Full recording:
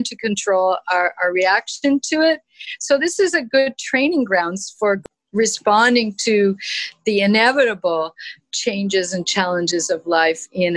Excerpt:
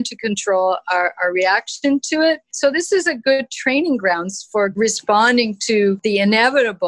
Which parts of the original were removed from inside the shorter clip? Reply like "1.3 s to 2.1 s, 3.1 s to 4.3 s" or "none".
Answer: 2.5 s to 2.7 s, 5.0 s to 5.3 s, 6.6 s to 7.0 s